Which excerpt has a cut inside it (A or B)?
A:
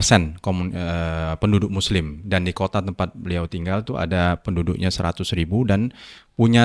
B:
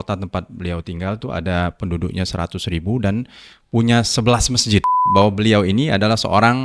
B